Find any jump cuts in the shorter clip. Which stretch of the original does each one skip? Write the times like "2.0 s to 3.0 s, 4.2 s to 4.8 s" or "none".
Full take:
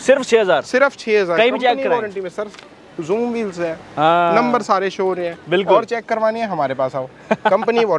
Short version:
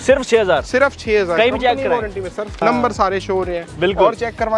2.6 s to 4.3 s